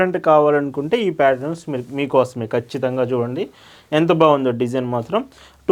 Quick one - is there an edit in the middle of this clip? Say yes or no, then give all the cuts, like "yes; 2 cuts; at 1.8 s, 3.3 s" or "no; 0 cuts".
no; 0 cuts